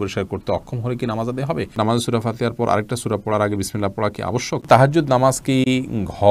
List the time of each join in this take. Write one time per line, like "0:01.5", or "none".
0:01.7
0:04.6